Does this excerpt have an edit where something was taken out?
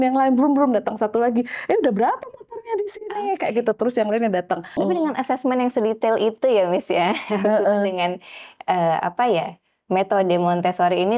yes; 1 cut; at 4.8 s

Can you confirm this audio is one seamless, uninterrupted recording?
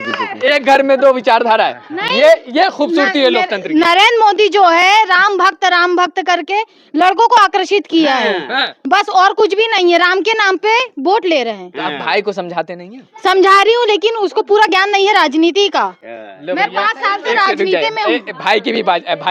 yes; 0 cuts

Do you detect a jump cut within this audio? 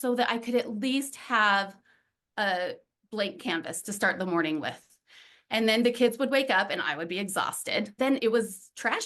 yes; 1 cut; at 8.1 s

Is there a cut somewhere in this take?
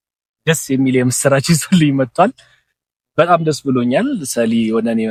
no; 0 cuts

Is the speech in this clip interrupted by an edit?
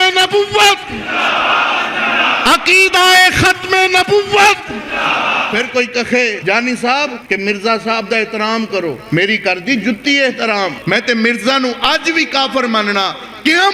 yes; 5 cuts; at 5.4 s, 6.4 s, 7.2 s, 9.0 s, 10.8 s

